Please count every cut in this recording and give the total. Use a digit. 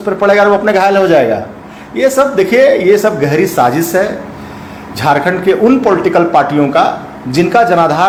0